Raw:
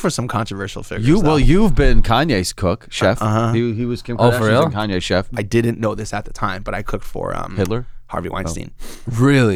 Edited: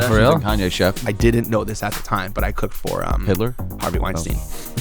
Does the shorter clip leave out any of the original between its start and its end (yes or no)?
no